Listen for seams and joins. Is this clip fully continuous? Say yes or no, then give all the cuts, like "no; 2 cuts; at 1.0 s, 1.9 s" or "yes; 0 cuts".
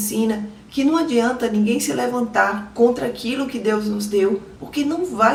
yes; 0 cuts